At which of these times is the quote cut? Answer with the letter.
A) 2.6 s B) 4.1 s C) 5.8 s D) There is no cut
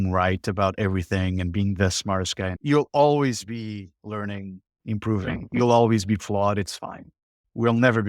A